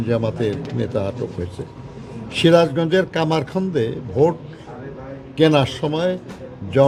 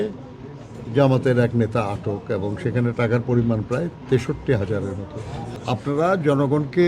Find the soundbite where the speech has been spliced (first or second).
second